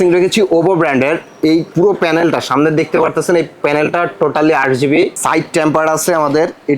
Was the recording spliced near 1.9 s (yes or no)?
no